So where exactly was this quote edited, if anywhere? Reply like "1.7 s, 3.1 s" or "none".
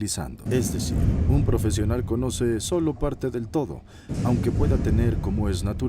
3.0 s

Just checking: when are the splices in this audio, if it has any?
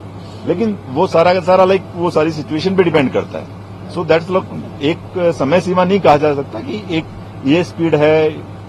none

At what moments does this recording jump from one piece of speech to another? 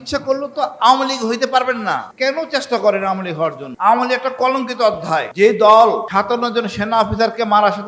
2.1 s, 3.7 s, 5.3 s, 6.1 s

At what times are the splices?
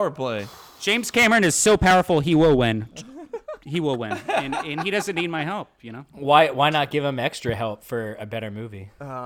0.9 s

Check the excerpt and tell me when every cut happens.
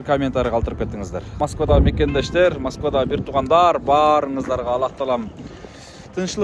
1.4 s

